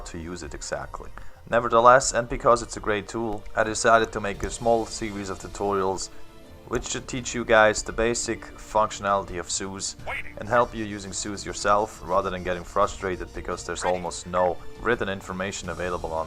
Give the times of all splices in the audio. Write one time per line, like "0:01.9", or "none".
0:06.5

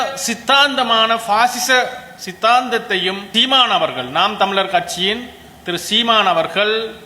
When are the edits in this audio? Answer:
0:03.3

